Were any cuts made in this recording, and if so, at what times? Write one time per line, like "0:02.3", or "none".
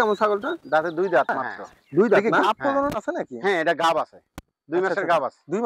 0:02.3